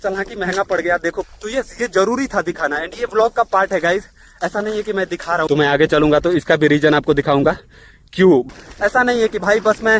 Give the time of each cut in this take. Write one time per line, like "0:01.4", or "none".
0:01.2
0:05.5
0:08.5